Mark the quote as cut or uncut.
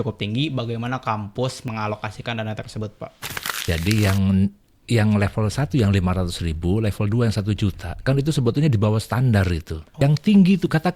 cut